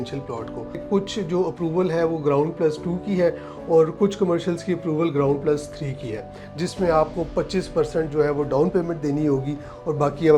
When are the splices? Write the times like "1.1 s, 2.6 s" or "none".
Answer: 0.8 s, 6.4 s